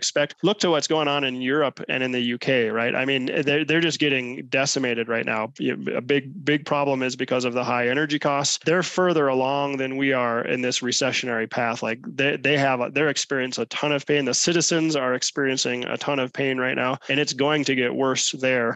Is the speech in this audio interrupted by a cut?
no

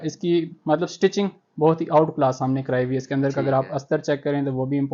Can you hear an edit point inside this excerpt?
no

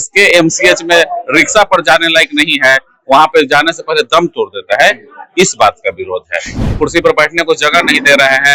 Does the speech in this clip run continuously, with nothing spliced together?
no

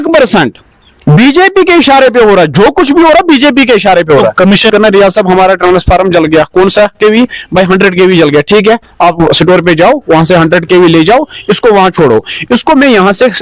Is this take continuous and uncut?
no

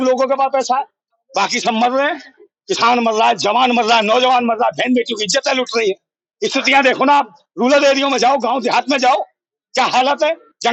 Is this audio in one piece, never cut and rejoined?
yes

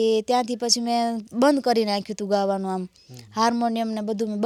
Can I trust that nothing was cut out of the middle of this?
yes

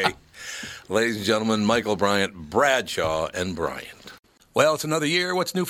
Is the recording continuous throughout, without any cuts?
no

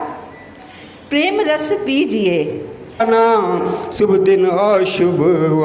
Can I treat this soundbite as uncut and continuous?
no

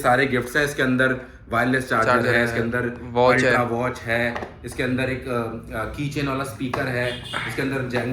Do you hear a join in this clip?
no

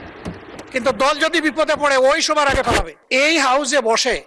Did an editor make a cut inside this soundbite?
yes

